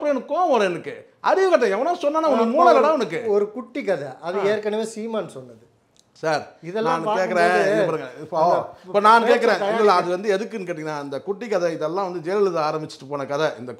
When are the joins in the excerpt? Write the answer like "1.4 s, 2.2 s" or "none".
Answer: none